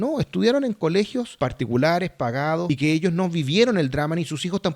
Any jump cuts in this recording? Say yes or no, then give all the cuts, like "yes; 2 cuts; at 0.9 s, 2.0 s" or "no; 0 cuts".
yes; 2 cuts; at 1.3 s, 2.7 s